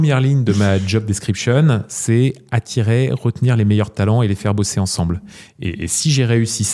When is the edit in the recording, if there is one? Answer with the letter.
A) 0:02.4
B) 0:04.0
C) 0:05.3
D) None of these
D